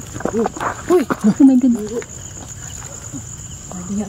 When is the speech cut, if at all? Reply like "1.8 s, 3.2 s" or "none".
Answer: none